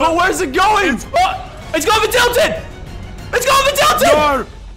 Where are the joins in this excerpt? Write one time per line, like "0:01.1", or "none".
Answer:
0:01.2